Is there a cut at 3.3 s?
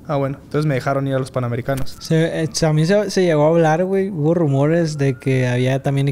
no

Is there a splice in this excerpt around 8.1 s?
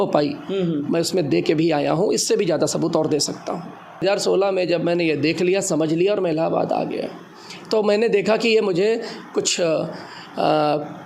no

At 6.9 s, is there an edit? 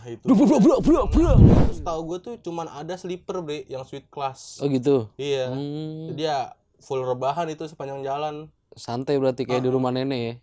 no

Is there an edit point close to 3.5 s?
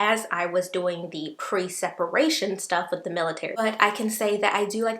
yes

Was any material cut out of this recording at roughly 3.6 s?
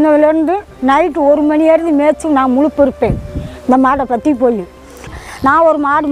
no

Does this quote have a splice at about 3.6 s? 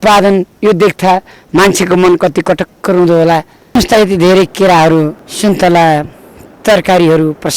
no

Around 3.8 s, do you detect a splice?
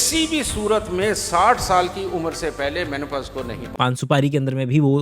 yes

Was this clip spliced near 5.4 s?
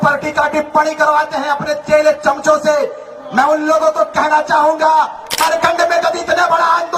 yes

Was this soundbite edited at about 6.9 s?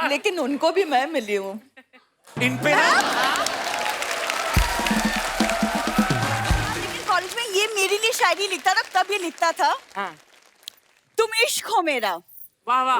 yes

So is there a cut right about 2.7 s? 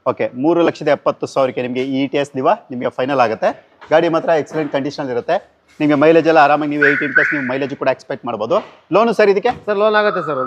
no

